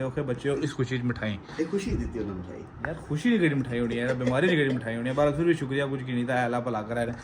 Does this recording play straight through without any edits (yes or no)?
yes